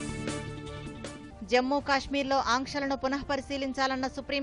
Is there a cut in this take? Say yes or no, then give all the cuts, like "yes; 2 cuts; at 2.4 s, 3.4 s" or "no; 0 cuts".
yes; 1 cut; at 1.3 s